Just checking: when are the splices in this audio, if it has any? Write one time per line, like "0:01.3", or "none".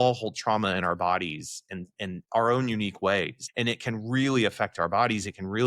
0:02.2
0:03.4